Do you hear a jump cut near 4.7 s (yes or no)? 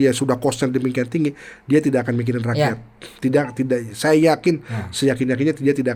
no